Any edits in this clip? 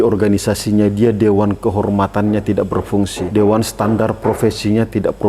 yes; 1 cut; at 3.2 s

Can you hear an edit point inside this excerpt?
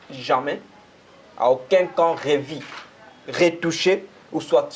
no; 0 cuts

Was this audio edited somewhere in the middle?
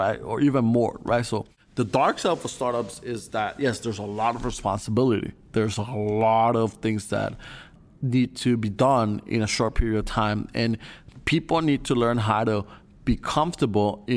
no; 0 cuts

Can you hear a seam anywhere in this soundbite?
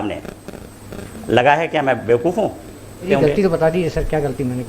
yes; 1 cut; at 3.1 s

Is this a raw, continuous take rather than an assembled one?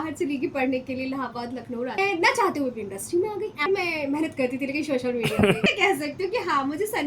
no; 3 cuts; at 2.0 s, 3.7 s, 5.7 s

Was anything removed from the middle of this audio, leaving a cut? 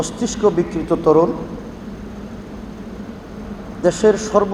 no; 0 cuts

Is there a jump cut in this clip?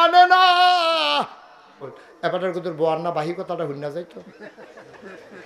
yes; 1 cut; at 2.0 s

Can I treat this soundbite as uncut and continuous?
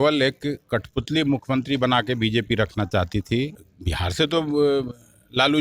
no; 1 cut; at 3.7 s

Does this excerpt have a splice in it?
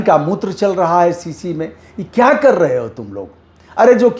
no; 0 cuts

